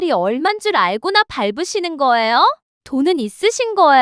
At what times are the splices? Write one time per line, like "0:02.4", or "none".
0:02.7